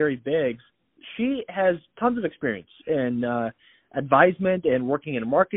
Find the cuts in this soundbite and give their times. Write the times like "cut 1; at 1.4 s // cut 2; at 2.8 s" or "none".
none